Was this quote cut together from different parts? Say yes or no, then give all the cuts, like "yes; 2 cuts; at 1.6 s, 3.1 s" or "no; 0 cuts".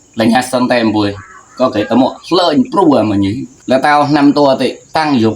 yes; 1 cut; at 3.5 s